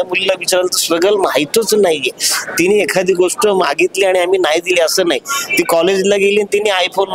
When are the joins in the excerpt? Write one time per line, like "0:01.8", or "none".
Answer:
none